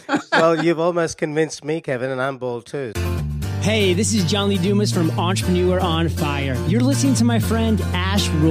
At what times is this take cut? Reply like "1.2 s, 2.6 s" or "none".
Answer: 2.9 s